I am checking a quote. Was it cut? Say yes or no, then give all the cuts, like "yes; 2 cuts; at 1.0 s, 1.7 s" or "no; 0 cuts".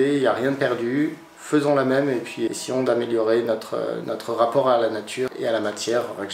yes; 3 cuts; at 2.5 s, 4.0 s, 5.3 s